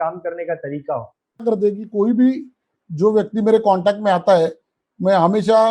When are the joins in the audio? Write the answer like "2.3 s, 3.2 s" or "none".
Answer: 1.4 s